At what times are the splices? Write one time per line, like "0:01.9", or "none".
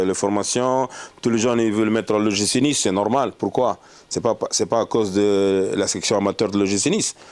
none